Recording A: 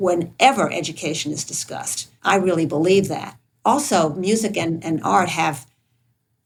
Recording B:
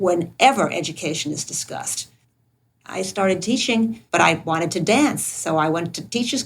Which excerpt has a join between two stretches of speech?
B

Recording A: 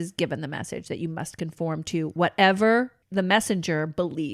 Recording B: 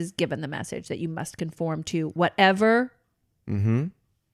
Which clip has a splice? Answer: A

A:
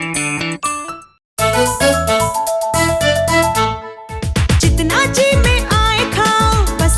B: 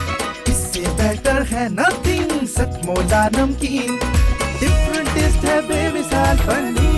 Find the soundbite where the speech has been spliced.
A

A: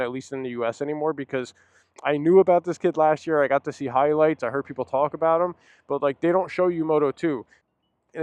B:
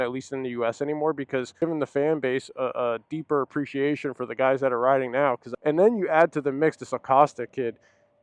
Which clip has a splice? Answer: B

